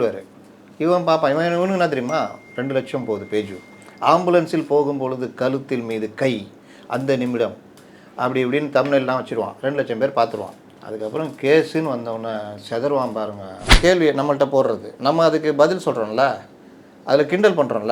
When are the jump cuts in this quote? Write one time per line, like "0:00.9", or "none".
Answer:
0:13.7